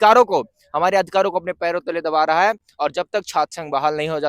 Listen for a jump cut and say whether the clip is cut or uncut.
uncut